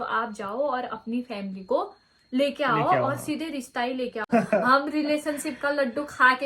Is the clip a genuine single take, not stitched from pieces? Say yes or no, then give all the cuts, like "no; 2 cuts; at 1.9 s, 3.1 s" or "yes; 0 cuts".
no; 1 cut; at 4.3 s